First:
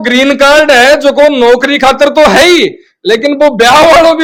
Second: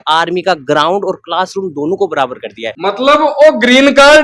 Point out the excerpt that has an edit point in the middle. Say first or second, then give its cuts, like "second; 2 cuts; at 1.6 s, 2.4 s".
second; 1 cut; at 2.6 s